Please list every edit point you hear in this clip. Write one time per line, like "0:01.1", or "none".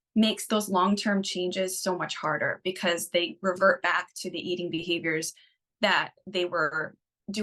none